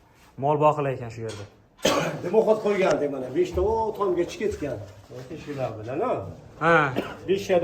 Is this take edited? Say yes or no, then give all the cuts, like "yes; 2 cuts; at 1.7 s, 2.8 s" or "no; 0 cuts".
yes; 1 cut; at 1.7 s